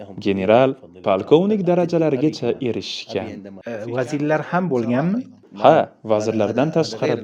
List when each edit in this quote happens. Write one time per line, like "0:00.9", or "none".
none